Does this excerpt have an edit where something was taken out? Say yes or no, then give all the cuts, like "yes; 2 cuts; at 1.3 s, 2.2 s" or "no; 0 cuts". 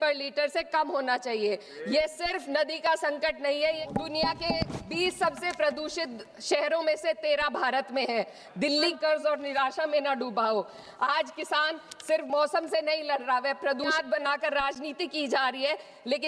yes; 3 cuts; at 3.8 s, 8.9 s, 13.9 s